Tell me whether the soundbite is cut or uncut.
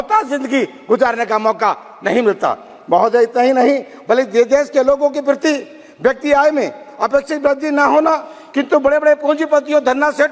uncut